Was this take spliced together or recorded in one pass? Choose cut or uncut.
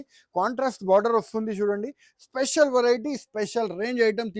uncut